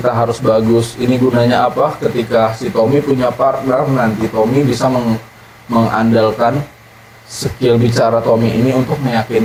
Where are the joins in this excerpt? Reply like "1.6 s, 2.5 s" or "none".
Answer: none